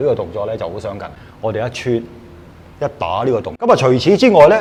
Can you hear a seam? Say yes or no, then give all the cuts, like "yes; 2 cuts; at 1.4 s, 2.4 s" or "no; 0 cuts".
no; 0 cuts